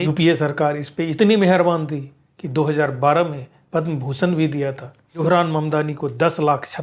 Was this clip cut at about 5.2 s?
yes; 1 cut; at 5.2 s

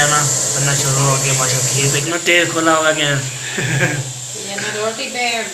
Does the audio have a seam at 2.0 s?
yes; 1 cut; at 2.0 s

